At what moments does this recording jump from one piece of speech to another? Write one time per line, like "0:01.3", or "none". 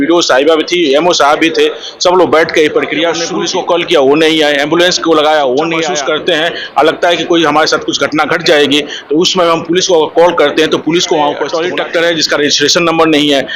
0:03.3
0:05.9
0:11.6